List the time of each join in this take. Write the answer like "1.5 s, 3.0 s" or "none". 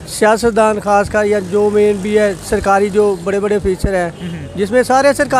none